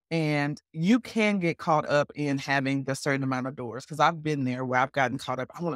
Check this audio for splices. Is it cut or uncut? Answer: uncut